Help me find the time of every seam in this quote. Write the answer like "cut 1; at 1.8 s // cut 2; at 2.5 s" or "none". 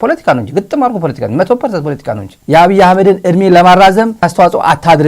cut 1; at 2.3 s // cut 2; at 4.2 s